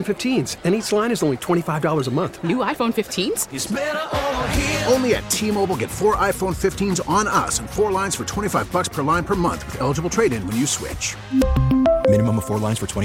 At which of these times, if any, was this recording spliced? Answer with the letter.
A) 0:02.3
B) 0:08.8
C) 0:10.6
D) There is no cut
D